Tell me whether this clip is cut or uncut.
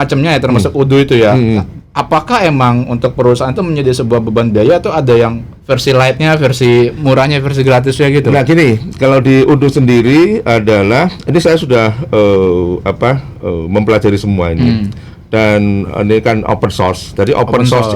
uncut